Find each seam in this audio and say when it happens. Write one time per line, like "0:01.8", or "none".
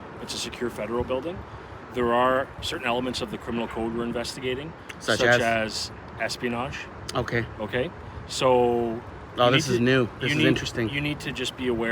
0:01.5

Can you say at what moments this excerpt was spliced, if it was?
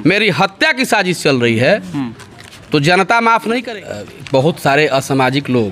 0:03.6

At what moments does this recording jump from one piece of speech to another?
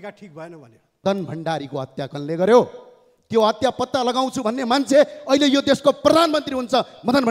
0:01.0

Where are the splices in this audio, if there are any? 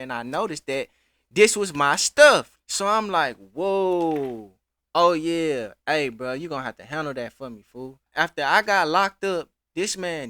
0:02.5
0:08.1

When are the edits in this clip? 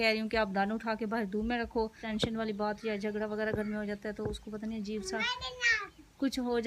0:02.1

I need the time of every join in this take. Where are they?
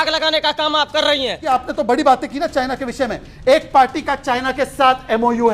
0:01.5

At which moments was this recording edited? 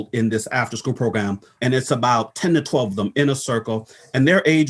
0:01.5

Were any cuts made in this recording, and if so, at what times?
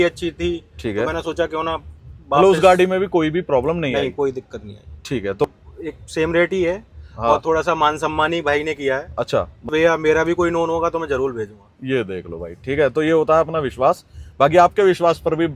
0:05.5
0:09.7

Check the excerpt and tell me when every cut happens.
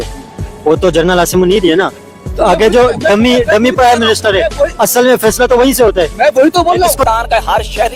none

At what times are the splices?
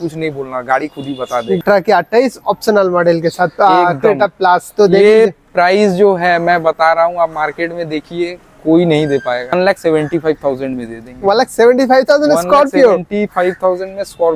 0:01.6
0:09.5

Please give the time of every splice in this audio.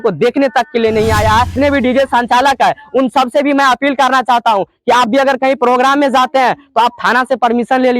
0:01.5

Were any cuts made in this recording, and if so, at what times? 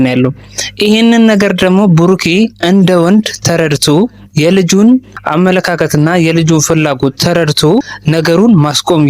0:05.2
0:08.0

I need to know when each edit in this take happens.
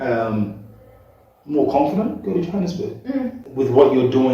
0:03.4

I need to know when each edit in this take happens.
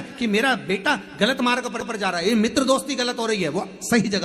none

